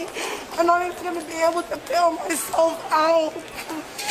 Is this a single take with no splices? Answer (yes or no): yes